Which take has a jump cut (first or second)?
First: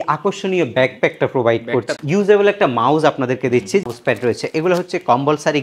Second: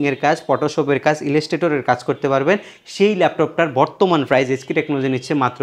first